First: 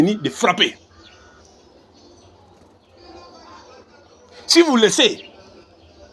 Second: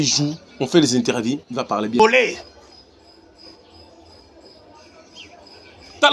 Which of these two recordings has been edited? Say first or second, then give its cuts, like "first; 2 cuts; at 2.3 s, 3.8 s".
second; 1 cut; at 2.0 s